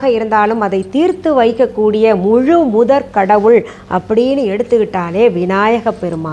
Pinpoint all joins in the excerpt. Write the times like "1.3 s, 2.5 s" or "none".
none